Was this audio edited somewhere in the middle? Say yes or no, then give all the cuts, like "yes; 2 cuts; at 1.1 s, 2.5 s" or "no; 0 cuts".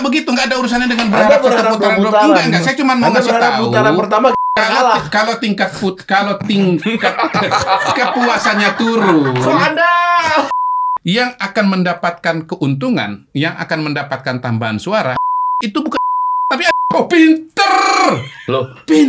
yes; 1 cut; at 10.5 s